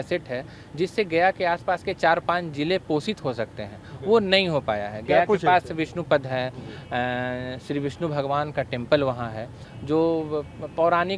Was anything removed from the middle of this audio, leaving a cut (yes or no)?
no